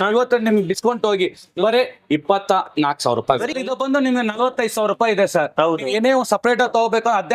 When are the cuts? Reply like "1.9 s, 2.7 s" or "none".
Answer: 3.5 s